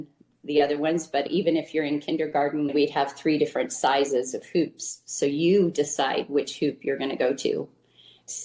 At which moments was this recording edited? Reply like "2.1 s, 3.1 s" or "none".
1.2 s